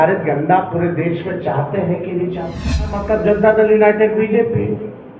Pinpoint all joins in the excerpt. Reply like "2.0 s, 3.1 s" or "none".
3.0 s